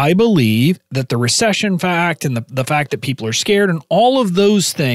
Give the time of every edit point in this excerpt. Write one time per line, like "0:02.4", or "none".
0:00.9